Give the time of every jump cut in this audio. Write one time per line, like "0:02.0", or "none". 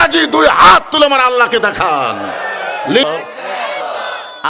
0:03.0